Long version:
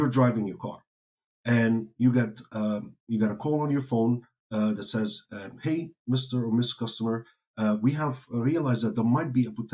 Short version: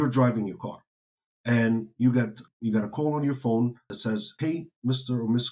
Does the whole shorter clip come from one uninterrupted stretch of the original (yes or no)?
no